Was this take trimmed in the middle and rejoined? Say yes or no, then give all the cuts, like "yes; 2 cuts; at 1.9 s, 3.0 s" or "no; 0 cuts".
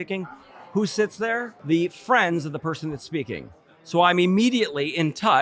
yes; 1 cut; at 1.5 s